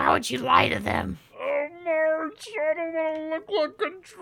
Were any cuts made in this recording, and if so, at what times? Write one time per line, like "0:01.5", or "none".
0:01.2

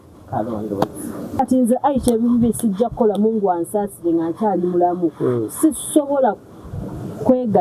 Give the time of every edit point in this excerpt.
0:01.4

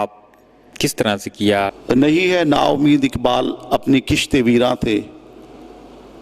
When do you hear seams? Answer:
0:01.7

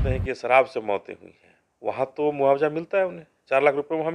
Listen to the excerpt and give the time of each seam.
none

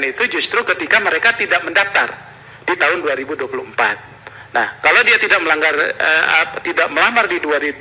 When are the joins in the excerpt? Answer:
none

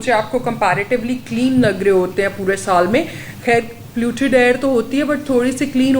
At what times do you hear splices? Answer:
none

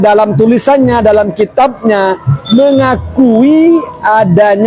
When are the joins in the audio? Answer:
none

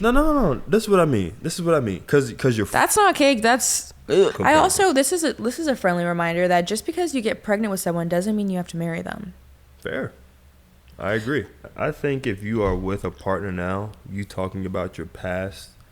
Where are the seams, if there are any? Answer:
0:04.4
0:11.6

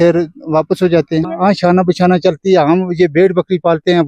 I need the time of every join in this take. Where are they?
0:01.3

